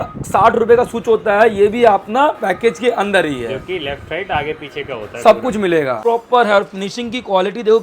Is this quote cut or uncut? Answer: cut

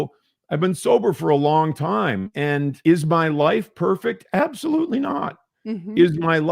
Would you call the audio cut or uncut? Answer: cut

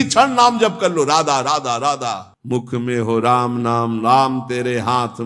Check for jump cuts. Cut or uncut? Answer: cut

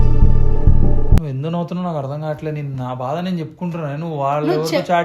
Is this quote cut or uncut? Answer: cut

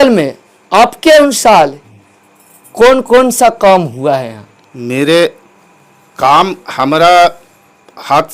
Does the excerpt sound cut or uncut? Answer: uncut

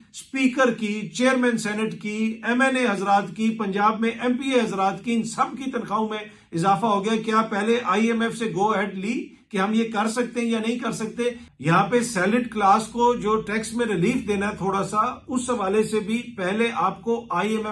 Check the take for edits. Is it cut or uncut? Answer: uncut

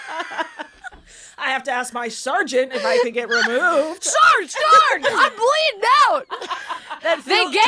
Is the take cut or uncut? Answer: uncut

